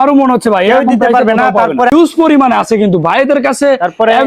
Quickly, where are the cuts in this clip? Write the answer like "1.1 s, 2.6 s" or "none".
1.9 s